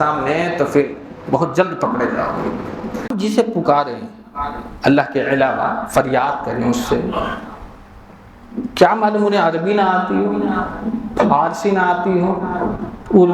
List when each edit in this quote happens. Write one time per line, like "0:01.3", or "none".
0:03.1